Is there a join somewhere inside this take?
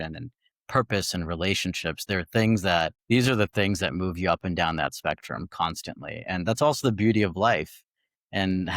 yes; 1 cut; at 3.0 s

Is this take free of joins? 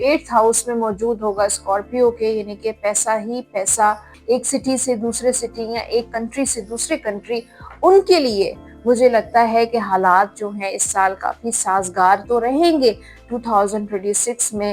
no; 2 cuts; at 4.1 s, 13.2 s

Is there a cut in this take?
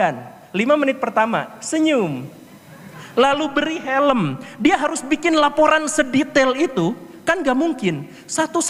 no; 0 cuts

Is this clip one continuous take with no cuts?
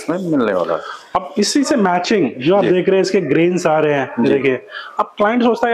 yes; 0 cuts

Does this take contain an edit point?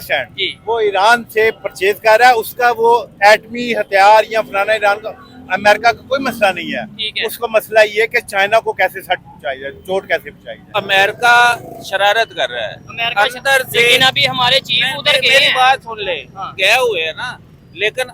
yes; 1 cut; at 10.7 s

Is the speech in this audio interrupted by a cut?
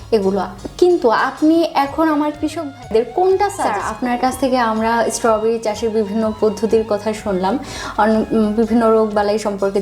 yes; 1 cut; at 3.8 s

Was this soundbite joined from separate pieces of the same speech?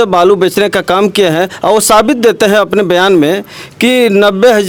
no; 0 cuts

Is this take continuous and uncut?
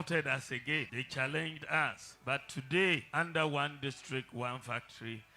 no; 3 cuts; at 1.0 s, 2.1 s, 3.1 s

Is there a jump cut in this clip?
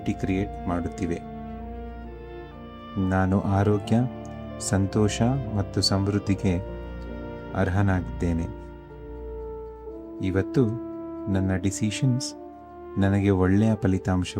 yes; 2 cuts; at 1.2 s, 2.9 s

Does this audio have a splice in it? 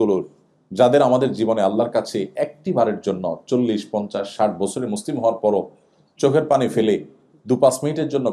no; 0 cuts

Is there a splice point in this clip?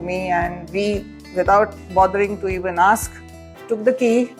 yes; 1 cut; at 1.2 s

